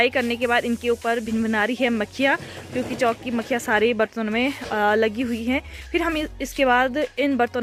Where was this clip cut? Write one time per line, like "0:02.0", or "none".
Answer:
none